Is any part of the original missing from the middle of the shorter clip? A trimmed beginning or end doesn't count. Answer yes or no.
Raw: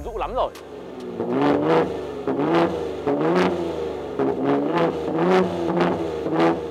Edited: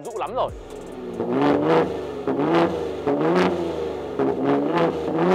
no